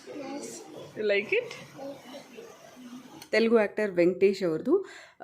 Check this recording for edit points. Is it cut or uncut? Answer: cut